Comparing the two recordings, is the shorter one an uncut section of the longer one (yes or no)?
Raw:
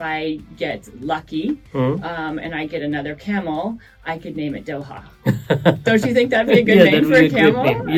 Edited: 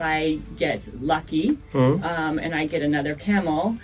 yes